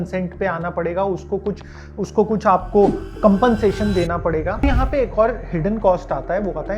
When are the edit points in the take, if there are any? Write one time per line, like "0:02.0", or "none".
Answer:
0:04.6